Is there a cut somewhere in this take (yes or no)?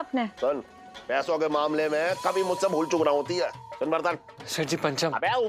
yes